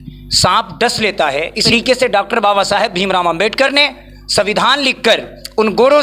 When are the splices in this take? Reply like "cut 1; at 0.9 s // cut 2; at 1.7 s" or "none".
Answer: cut 1; at 1.6 s

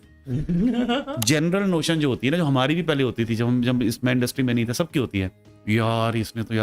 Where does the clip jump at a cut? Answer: cut 1; at 1.1 s

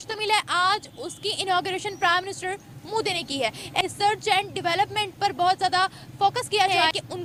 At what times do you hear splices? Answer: none

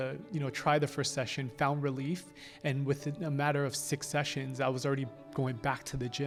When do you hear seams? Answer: none

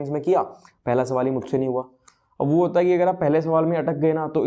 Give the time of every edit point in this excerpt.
none

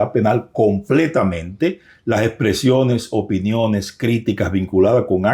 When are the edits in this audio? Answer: none

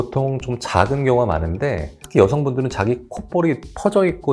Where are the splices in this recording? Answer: none

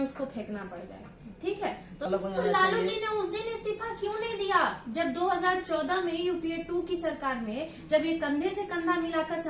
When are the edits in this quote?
cut 1; at 2.1 s

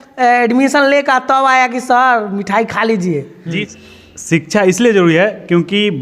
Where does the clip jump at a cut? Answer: cut 1; at 3.6 s

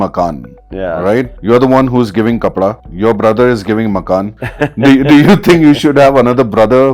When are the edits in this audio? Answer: cut 1; at 1.3 s // cut 2; at 2.9 s // cut 3; at 4.4 s

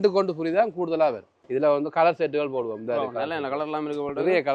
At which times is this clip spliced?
cut 1; at 1.3 s

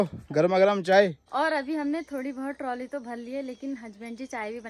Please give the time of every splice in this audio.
none

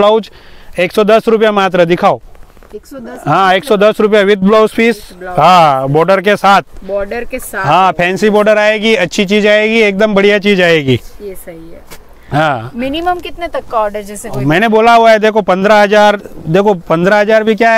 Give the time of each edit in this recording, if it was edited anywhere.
none

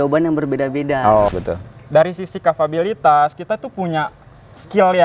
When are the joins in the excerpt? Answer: cut 1; at 1.3 s

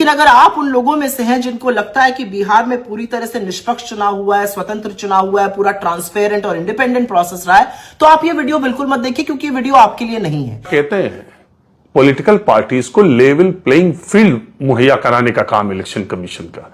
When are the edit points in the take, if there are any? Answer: cut 1; at 10.5 s

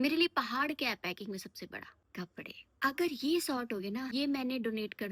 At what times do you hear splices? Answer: none

